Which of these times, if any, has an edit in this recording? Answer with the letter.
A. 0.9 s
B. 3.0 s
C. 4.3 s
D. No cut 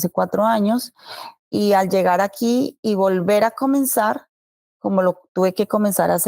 D